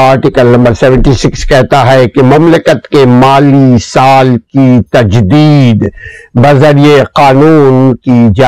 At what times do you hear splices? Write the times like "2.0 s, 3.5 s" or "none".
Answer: none